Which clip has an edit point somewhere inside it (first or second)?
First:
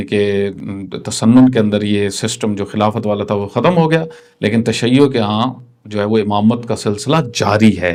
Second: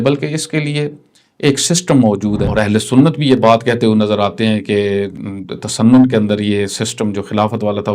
second